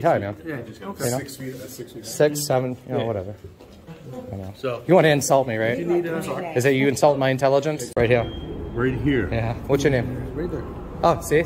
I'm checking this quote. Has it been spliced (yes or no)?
yes